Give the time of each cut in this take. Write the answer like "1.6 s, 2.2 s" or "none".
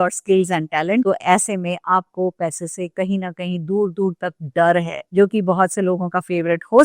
1.0 s, 5.0 s